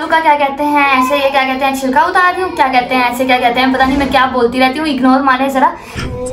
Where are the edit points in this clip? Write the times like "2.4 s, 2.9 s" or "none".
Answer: none